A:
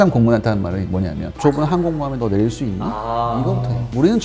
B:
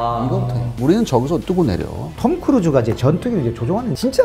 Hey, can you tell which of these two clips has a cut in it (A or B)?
B